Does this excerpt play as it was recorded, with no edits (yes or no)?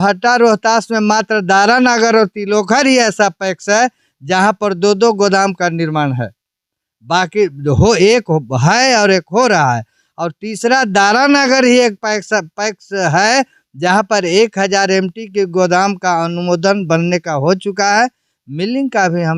yes